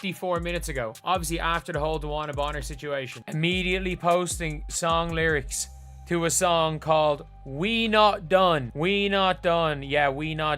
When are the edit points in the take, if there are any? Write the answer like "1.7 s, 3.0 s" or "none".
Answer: 3.2 s, 8.7 s